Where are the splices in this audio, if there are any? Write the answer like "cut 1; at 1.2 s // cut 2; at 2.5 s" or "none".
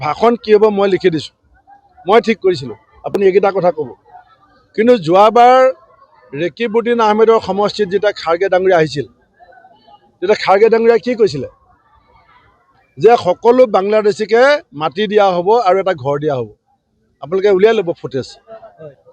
none